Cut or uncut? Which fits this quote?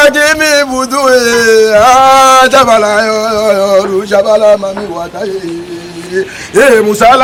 uncut